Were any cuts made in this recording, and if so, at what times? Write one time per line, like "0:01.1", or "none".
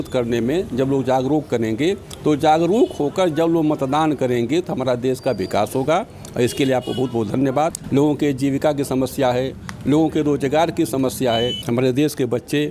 0:07.8
0:11.6